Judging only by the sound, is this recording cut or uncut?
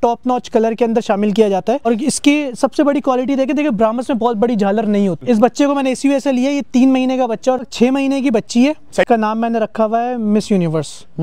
cut